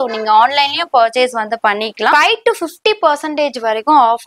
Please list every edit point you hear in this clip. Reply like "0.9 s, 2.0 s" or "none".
2.1 s

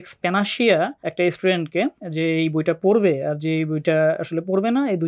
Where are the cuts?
1.0 s, 2.0 s

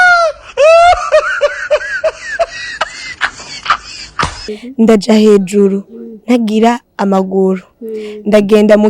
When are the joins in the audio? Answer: 4.4 s

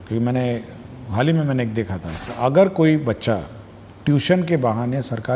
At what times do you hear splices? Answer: 2.3 s

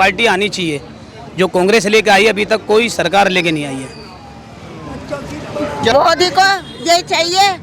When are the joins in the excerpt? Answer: 5.9 s

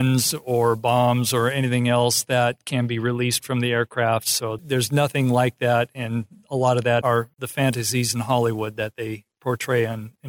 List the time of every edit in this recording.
4.5 s, 7.1 s

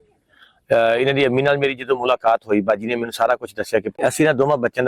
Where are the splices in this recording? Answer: 4.0 s

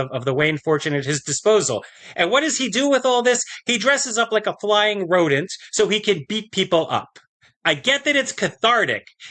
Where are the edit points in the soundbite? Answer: 2.0 s

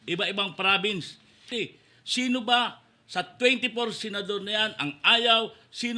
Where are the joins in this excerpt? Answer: 1.5 s

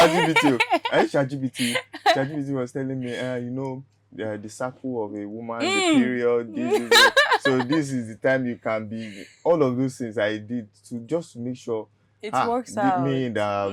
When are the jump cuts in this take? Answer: none

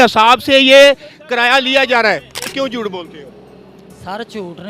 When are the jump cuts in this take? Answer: 2.5 s

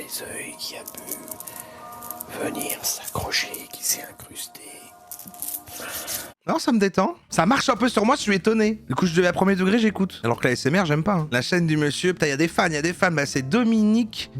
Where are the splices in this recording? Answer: 6.4 s, 7.2 s, 8.9 s, 10.2 s, 11.3 s

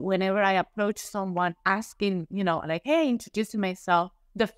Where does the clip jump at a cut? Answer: none

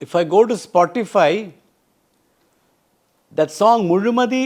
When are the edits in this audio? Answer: none

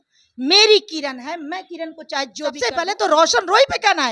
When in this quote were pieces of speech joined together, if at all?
2.6 s

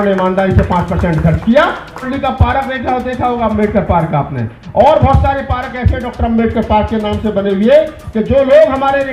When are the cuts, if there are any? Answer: 2.1 s

